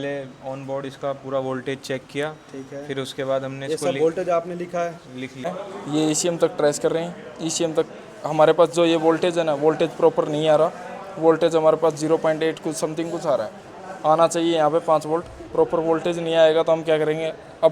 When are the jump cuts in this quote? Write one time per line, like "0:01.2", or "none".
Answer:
0:05.3